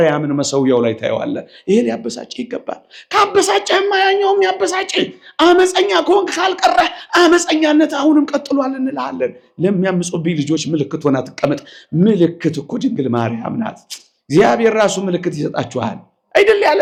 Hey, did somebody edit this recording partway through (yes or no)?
no